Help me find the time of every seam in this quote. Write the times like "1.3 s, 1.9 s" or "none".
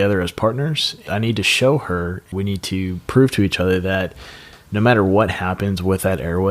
1.1 s, 2.3 s